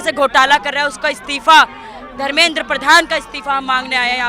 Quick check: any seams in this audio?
no; 0 cuts

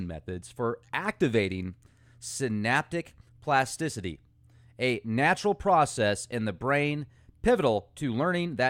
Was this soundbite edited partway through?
yes; 1 cut; at 3.1 s

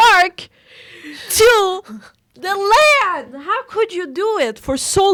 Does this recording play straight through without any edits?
yes; 0 cuts

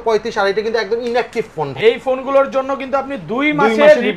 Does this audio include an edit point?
yes; 1 cut; at 1.7 s

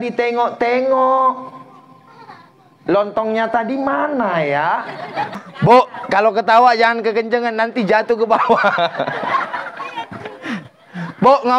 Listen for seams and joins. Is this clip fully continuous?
no; 1 cut; at 5.3 s

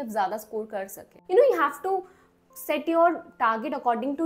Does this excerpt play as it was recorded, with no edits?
no; 1 cut; at 1.1 s

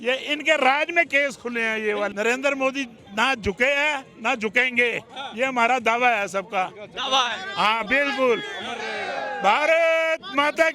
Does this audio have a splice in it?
yes; 1 cut; at 2.1 s

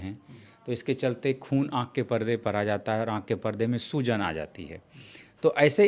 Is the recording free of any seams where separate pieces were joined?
yes; 0 cuts

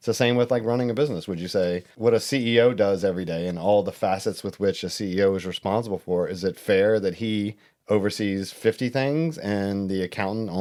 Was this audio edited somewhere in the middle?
no; 0 cuts

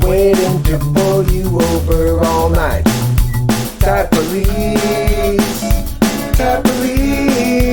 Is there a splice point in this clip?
no; 0 cuts

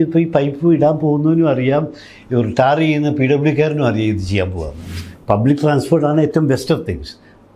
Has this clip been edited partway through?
yes; 1 cut; at 5.1 s

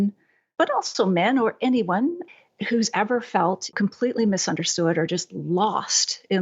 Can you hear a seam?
yes; 1 cut; at 3.7 s

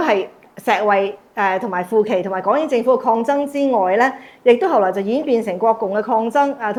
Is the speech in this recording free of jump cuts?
yes; 0 cuts

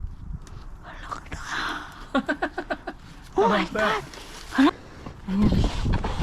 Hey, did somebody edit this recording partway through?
yes; 1 cut; at 4.9 s

